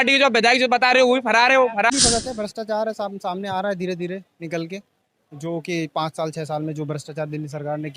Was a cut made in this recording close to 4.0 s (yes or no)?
no